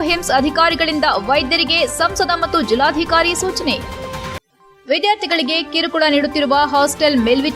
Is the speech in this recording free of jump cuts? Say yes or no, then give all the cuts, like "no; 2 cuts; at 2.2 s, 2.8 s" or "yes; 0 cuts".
yes; 0 cuts